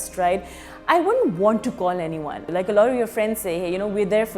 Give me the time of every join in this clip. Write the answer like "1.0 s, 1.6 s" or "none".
2.4 s